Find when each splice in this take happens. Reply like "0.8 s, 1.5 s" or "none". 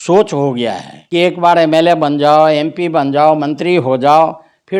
0.9 s